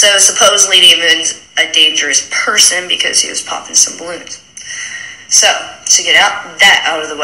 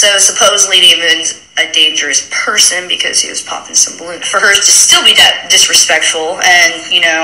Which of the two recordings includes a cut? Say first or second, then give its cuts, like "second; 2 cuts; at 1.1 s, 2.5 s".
first; 1 cut; at 4.3 s